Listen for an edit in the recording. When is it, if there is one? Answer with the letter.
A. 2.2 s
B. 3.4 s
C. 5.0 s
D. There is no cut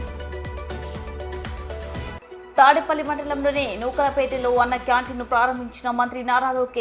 A